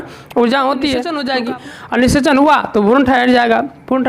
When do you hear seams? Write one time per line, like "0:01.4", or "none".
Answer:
0:01.2

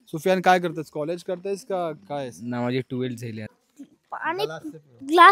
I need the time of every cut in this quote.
0:03.6

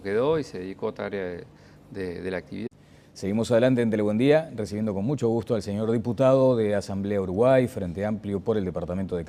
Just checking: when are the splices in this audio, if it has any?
none

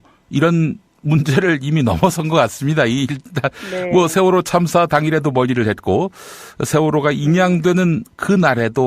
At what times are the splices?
none

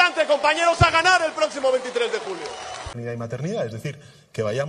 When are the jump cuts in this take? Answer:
0:02.9

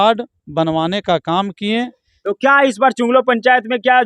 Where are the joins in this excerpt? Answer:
0:02.0

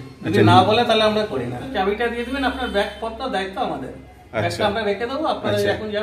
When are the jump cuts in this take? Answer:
0:01.7

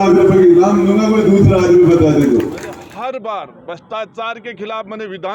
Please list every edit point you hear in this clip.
0:02.7

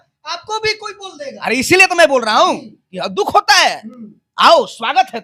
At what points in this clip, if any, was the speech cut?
none

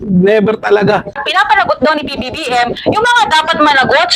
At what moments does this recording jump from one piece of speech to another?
0:01.3

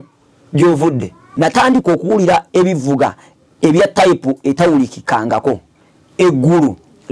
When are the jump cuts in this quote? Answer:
0:01.2

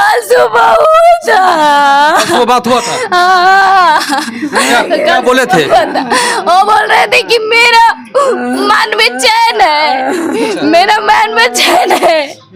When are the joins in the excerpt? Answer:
none

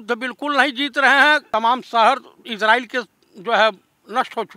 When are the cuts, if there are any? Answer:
0:01.4

